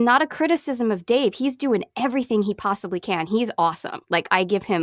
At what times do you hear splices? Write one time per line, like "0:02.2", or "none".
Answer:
none